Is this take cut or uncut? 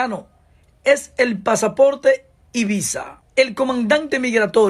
cut